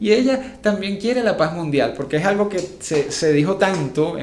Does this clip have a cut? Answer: no; 0 cuts

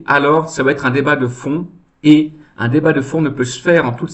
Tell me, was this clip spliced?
yes; 1 cut; at 1.8 s

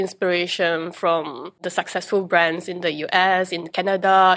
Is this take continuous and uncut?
no; 1 cut; at 1.6 s

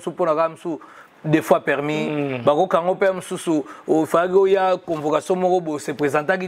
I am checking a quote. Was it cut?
no; 0 cuts

